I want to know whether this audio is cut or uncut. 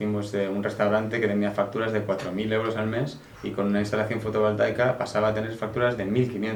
uncut